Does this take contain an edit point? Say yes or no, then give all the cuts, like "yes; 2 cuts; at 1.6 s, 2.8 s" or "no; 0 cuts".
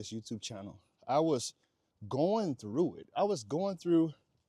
no; 0 cuts